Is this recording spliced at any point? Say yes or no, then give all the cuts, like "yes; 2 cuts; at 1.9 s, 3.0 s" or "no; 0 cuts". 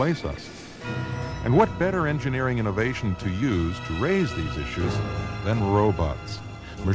no; 0 cuts